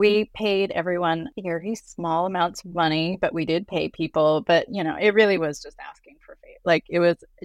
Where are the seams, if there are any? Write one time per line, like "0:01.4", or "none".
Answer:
none

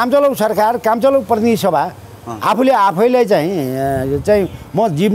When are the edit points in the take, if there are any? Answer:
none

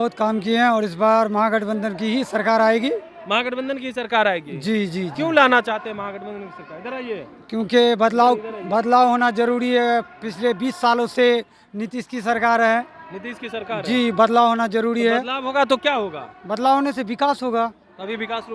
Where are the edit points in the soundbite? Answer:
none

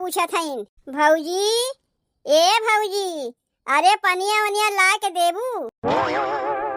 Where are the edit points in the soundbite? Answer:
0:05.7

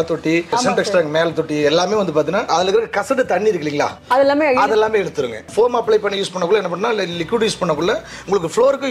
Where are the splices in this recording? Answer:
0:05.4

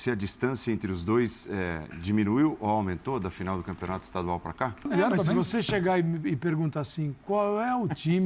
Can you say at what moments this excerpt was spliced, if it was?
0:04.9

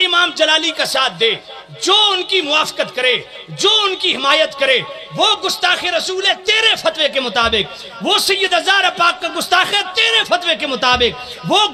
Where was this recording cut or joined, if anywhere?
none

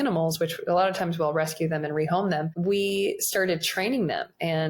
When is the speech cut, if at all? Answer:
0:02.5

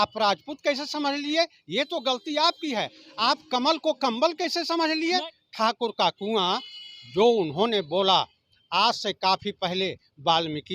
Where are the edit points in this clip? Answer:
0:05.4

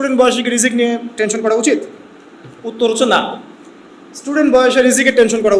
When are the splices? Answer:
none

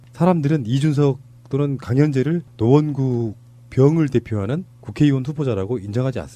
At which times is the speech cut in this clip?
none

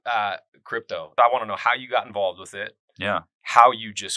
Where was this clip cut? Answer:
0:01.1

